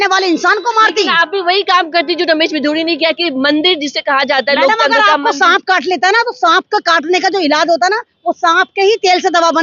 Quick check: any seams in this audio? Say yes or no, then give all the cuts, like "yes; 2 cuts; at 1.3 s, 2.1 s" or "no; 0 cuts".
no; 0 cuts